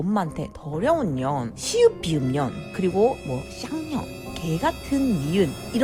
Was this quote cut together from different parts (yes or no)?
no